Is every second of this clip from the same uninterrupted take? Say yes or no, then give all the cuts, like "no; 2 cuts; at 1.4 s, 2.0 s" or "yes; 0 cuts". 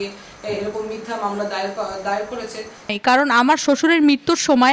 no; 1 cut; at 2.9 s